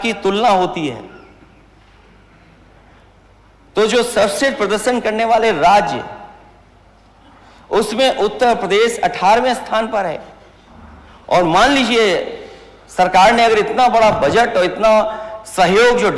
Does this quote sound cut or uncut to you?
uncut